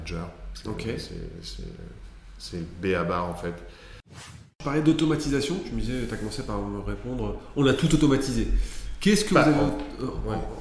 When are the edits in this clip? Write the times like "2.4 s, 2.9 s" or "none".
4.3 s